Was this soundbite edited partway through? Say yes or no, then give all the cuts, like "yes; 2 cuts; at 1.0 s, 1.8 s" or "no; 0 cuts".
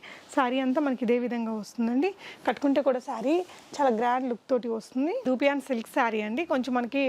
yes; 1 cut; at 5.2 s